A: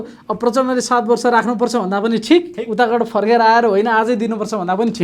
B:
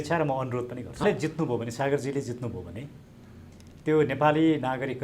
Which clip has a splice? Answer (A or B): B